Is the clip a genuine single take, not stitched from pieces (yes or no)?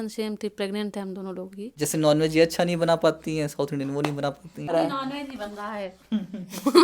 no